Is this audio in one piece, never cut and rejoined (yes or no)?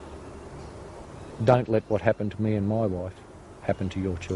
yes